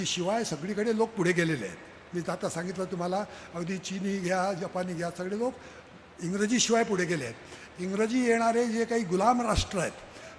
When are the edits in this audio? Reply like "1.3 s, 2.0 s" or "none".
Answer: none